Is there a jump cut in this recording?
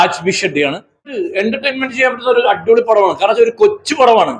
yes; 1 cut; at 1.2 s

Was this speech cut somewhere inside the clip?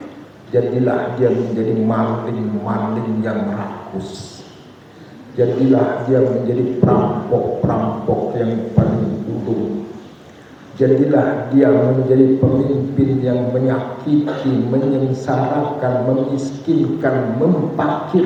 no; 0 cuts

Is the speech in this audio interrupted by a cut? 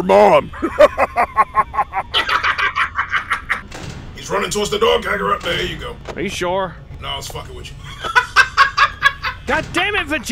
yes; 2 cuts; at 3.6 s, 9.3 s

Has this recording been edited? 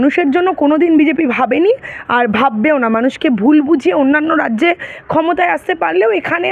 no; 0 cuts

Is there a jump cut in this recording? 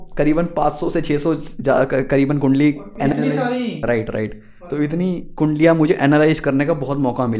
no; 0 cuts

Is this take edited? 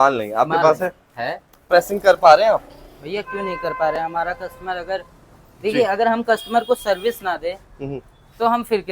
yes; 1 cut; at 1.6 s

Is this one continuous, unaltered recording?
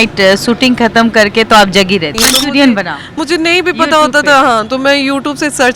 no; 1 cut; at 2.2 s

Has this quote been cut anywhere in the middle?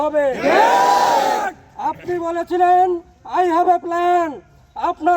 no; 0 cuts

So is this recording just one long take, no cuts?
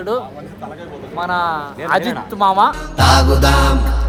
yes; 0 cuts

